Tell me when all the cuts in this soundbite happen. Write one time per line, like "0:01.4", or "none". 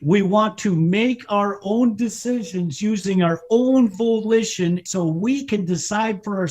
0:04.8